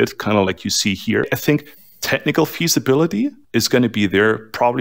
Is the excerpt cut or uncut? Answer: cut